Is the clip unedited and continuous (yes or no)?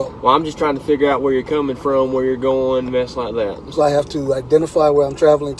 yes